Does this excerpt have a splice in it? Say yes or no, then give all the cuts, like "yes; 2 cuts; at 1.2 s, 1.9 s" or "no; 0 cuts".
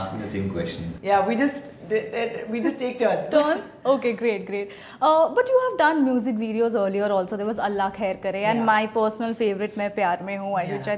no; 0 cuts